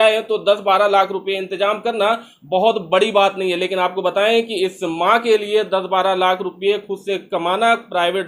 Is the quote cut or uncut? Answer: uncut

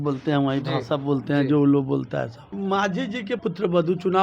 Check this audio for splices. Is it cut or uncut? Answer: cut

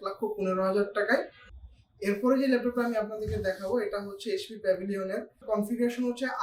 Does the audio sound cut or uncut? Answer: cut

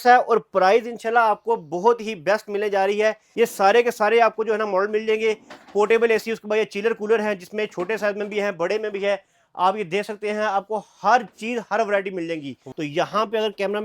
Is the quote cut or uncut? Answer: cut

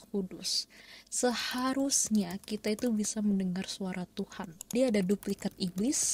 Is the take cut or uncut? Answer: cut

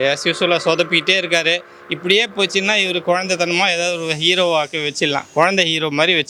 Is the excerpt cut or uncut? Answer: uncut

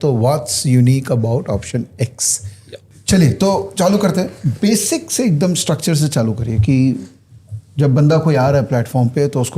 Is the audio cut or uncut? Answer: uncut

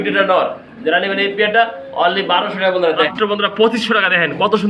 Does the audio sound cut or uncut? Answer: cut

